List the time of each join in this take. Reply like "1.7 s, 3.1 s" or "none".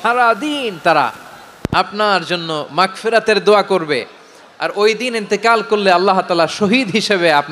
none